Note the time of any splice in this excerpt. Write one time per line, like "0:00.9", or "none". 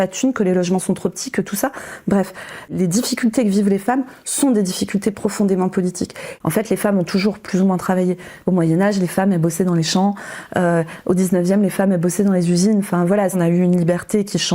0:02.7
0:06.2
0:08.3
0:13.4